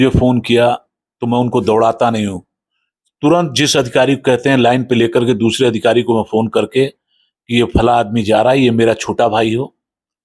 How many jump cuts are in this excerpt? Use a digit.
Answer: 0